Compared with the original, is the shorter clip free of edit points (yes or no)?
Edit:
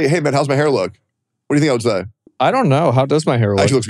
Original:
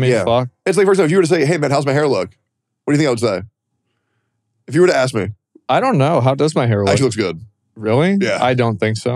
no